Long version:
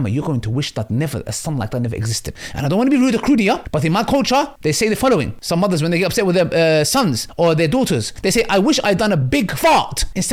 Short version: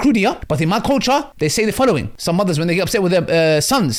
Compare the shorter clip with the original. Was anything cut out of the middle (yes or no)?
no